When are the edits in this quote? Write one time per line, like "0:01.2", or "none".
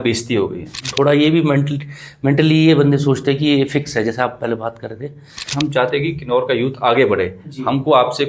0:00.9
0:05.4